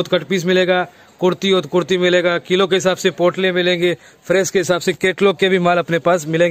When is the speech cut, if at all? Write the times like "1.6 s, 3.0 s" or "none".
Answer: none